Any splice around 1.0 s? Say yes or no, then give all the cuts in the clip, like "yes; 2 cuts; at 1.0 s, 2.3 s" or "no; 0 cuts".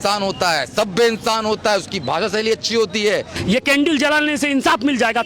no; 1 cut; at 3.3 s